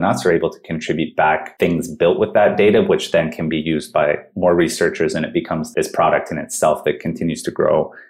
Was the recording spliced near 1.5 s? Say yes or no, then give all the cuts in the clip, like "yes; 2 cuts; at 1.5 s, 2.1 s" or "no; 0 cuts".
yes; 2 cuts; at 1.5 s, 5.6 s